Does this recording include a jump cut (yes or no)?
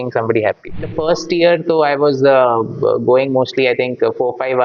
yes